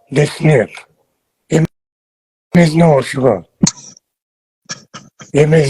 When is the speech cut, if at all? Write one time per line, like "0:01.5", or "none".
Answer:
none